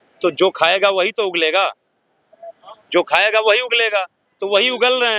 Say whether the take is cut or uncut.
uncut